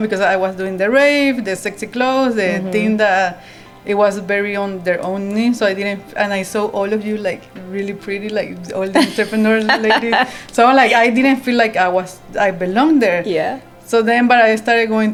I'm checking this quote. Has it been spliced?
no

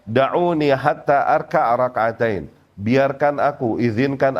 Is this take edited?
no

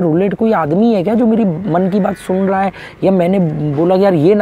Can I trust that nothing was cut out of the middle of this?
yes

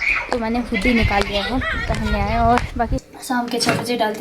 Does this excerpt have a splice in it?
yes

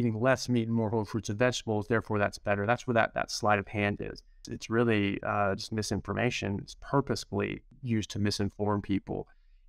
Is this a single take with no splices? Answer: no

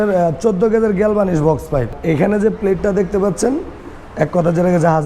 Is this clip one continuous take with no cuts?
no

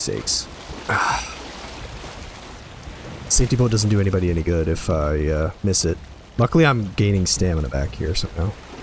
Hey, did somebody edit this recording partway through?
no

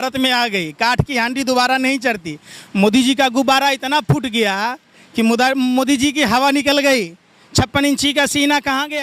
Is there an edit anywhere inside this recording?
no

